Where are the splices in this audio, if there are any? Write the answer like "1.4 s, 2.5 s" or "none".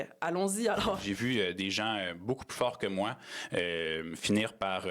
1.0 s